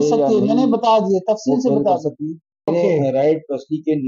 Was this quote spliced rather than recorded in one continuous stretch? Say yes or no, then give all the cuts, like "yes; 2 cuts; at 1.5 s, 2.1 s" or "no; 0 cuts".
yes; 1 cut; at 2.7 s